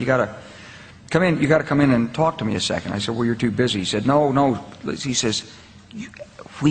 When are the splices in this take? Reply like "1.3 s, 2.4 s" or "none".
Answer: 4.7 s